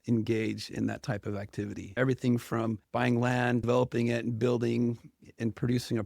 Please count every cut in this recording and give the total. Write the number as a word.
three